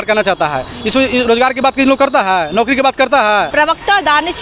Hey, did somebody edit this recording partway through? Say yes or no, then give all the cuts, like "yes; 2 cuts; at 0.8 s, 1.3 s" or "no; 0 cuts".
yes; 1 cut; at 3.5 s